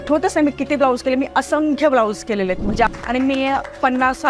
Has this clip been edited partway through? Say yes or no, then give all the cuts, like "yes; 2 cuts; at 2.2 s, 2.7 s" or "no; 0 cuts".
yes; 1 cut; at 2.9 s